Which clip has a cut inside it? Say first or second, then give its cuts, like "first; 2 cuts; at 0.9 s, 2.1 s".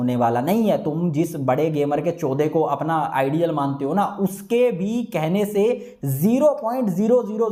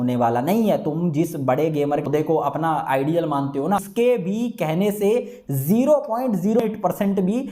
second; 3 cuts; at 2.0 s, 3.9 s, 6.6 s